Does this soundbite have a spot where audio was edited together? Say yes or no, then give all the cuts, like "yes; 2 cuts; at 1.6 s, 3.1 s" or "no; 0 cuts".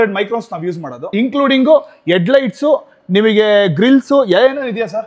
yes; 1 cut; at 1.1 s